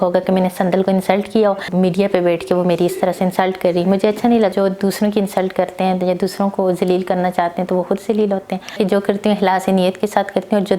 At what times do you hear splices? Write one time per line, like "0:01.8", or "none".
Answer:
0:01.7
0:04.5
0:08.8